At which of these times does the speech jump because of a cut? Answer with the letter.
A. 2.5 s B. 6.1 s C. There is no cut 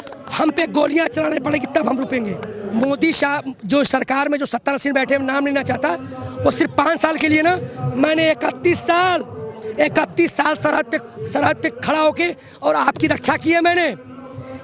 A